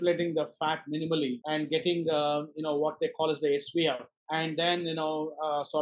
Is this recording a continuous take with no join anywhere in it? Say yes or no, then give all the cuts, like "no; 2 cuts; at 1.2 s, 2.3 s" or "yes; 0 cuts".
no; 2 cuts; at 1.4 s, 4.1 s